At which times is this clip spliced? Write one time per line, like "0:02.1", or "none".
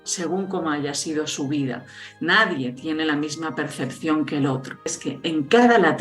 0:04.9

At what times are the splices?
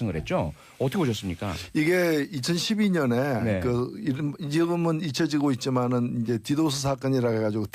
0:05.0

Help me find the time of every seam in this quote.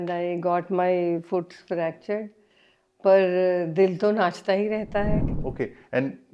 0:05.2

